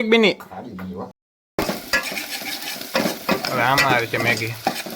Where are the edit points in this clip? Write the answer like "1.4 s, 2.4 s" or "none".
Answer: 1.1 s